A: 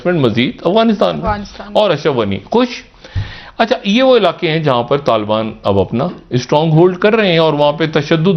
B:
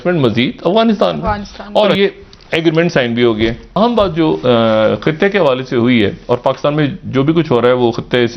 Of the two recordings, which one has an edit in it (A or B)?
B